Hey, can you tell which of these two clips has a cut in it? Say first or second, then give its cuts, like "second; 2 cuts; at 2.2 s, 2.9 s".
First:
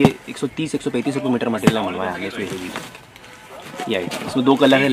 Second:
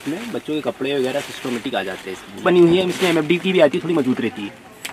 second; 1 cut; at 2.4 s